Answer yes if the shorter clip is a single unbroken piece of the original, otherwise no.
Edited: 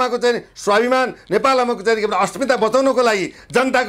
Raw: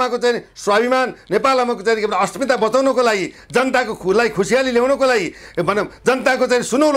yes